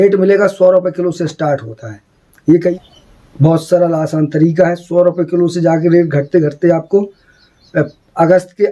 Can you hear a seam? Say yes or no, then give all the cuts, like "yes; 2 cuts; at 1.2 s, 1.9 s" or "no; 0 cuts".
yes; 1 cut; at 2.8 s